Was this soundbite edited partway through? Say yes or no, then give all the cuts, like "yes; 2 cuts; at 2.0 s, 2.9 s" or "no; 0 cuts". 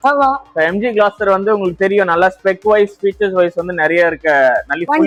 no; 0 cuts